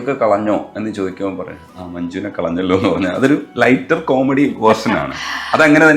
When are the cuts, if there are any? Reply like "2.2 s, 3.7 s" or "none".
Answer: none